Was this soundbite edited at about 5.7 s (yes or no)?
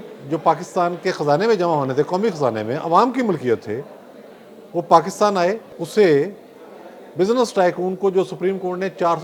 yes